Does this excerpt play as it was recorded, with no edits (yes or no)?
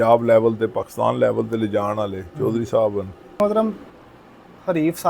no